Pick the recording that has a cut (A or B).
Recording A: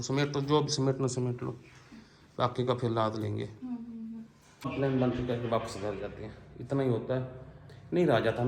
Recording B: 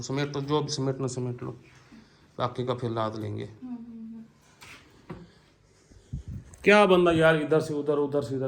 A